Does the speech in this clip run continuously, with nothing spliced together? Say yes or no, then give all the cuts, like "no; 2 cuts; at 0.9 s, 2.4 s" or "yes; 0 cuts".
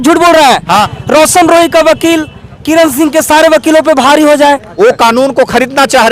no; 2 cuts; at 0.9 s, 4.7 s